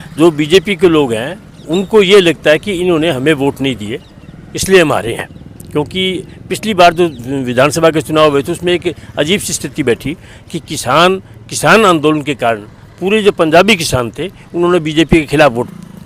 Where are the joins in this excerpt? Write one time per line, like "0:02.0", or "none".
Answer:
none